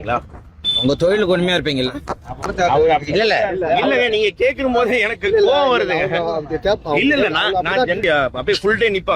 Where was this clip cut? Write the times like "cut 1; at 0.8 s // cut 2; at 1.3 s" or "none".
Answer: cut 1; at 2.3 s // cut 2; at 8.0 s